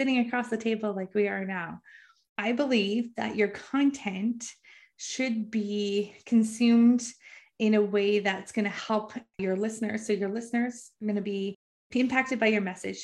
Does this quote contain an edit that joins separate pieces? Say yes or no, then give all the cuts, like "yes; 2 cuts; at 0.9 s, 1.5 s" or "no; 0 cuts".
yes; 1 cut; at 2.1 s